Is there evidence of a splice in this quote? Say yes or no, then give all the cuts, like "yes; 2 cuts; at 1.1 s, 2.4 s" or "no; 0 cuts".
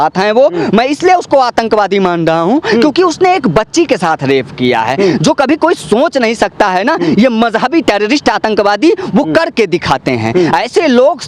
no; 0 cuts